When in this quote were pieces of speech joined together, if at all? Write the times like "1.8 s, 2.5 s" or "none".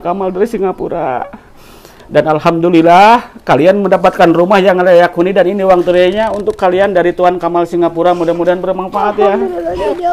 none